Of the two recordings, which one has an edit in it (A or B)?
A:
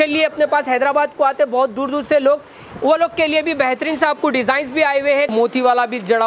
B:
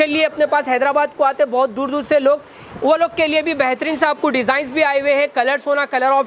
A